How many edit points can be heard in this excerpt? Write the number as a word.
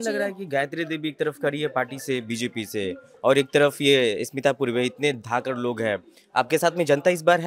zero